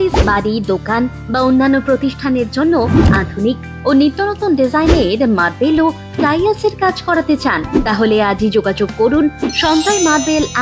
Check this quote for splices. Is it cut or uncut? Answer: uncut